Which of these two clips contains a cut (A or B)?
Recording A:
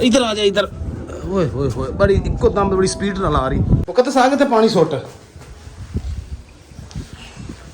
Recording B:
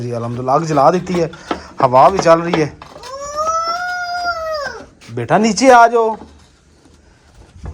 A